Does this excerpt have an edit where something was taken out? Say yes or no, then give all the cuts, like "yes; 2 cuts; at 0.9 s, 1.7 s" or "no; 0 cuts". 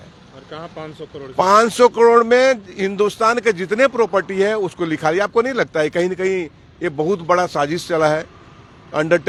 no; 0 cuts